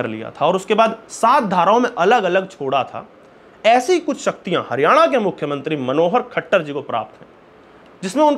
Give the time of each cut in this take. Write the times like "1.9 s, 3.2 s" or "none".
none